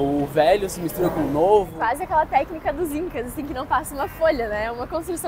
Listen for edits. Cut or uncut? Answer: cut